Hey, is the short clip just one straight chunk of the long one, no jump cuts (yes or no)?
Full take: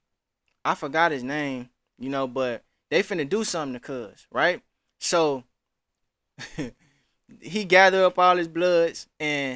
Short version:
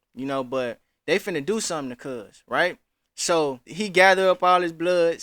no